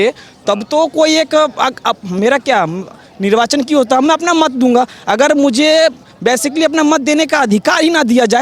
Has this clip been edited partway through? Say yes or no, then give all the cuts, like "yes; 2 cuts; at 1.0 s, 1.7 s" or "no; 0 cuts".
no; 0 cuts